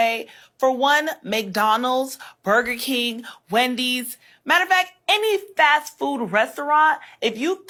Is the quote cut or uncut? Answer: uncut